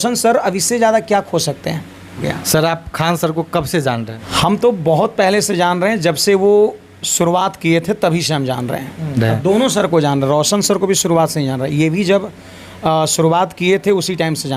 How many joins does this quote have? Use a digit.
3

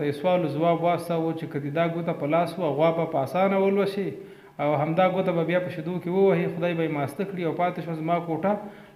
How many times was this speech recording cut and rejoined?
0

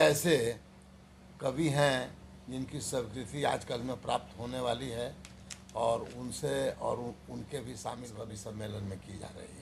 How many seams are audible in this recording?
1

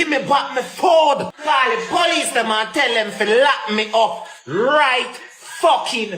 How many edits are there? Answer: 1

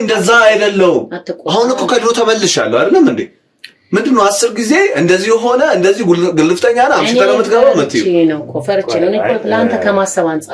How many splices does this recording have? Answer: 0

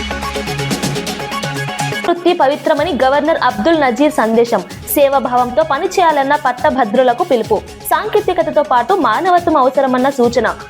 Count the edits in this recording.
1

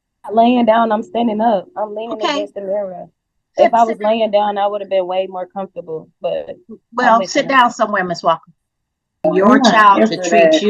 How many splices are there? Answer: 1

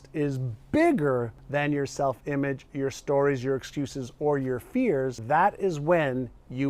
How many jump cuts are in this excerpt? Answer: 2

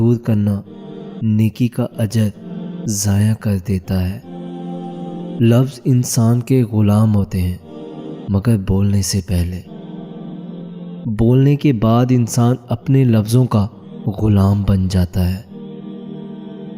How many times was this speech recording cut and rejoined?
2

